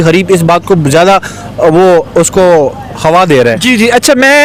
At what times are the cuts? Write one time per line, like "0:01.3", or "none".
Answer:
none